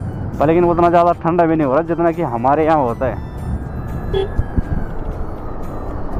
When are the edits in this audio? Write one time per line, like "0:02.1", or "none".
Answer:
none